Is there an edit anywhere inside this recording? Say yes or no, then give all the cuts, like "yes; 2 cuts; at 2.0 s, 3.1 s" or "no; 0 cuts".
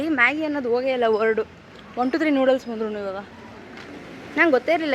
no; 0 cuts